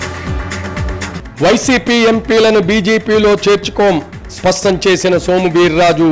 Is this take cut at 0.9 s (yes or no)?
yes